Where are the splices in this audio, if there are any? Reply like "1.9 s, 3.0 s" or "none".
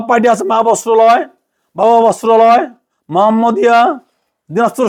none